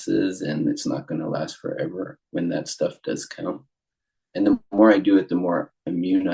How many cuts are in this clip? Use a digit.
0